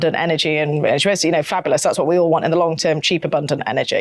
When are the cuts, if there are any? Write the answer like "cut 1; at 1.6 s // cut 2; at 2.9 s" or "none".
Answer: none